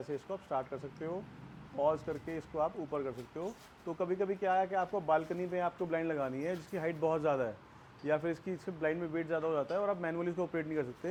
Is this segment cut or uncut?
uncut